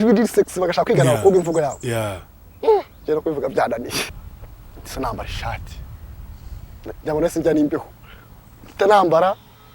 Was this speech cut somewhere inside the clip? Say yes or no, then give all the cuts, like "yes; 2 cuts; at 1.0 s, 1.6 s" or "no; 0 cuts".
yes; 1 cut; at 4.0 s